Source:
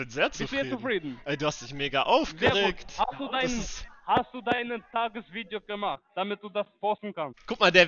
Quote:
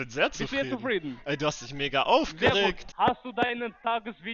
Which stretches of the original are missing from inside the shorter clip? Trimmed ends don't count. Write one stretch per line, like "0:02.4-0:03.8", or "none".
0:02.8-0:03.9